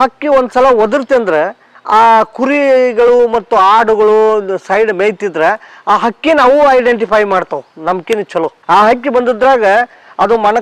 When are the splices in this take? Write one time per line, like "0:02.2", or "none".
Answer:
0:08.6